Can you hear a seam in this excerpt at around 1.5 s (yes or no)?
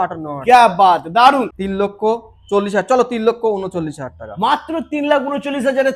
yes